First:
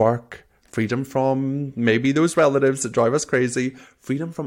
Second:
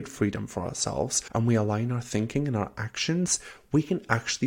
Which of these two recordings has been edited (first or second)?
second